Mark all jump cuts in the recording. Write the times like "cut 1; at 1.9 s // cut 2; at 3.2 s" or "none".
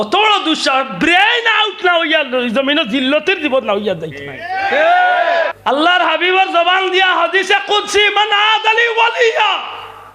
cut 1; at 5.6 s